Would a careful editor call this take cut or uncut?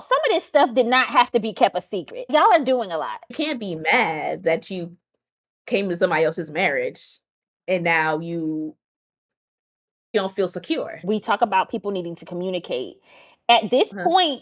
cut